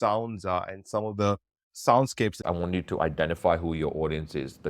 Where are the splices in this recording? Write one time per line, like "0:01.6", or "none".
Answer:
0:02.4